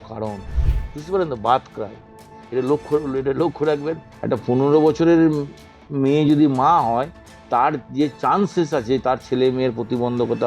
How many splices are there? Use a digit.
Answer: 1